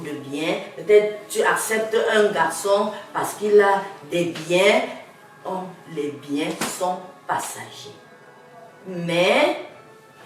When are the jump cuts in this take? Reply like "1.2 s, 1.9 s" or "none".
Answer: none